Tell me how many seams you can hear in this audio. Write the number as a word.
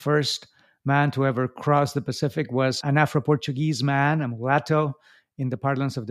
one